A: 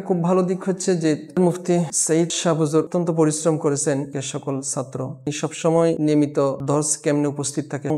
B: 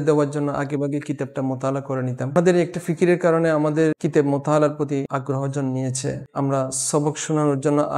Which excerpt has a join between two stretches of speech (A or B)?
B